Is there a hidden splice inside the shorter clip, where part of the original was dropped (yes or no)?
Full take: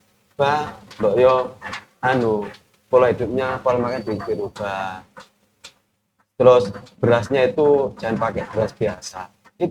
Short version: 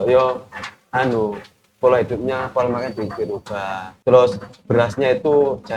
yes